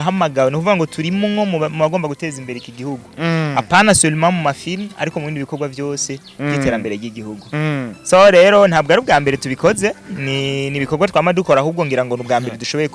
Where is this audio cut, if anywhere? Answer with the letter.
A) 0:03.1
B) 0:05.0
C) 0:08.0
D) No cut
D